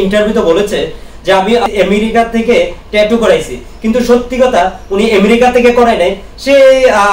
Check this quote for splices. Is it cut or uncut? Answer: cut